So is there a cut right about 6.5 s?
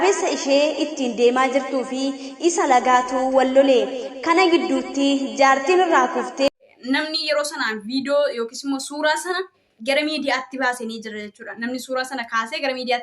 yes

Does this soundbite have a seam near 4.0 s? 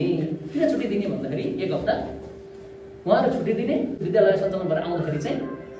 yes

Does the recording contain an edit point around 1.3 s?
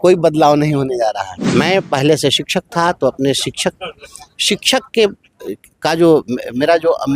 yes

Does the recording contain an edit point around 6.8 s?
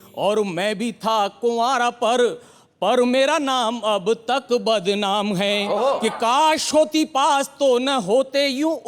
no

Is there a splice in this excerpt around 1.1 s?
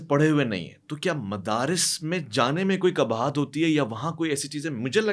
no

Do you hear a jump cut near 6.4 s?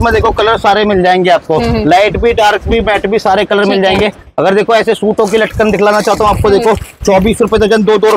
no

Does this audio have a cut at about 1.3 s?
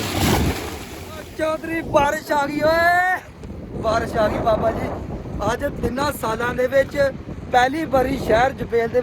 yes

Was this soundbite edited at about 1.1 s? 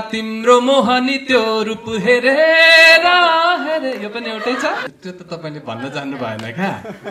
no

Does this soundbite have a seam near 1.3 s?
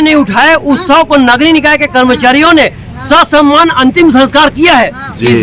no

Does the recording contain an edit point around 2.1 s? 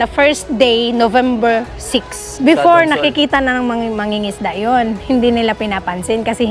yes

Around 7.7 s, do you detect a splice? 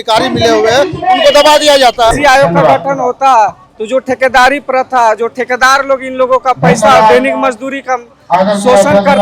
no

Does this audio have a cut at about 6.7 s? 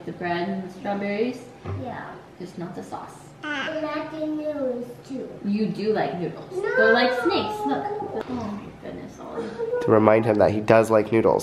no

